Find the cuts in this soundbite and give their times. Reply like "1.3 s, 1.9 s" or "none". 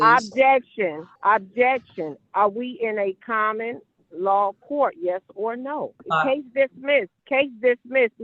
1.1 s, 6.0 s, 7.2 s